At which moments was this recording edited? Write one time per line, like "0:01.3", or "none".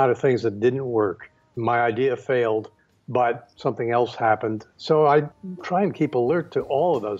0:01.5
0:04.7
0:05.3